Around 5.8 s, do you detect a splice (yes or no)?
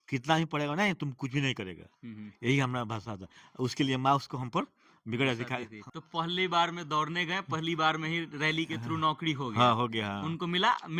yes